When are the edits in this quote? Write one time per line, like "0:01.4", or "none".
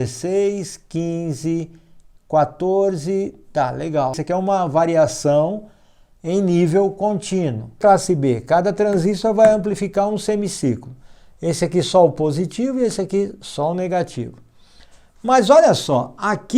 0:04.2
0:07.8